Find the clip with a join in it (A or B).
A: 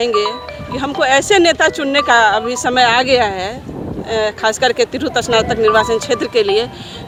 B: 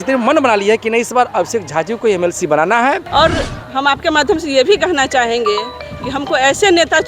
B